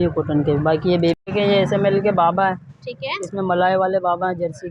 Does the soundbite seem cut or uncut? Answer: cut